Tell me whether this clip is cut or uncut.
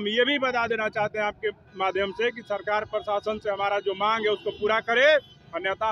uncut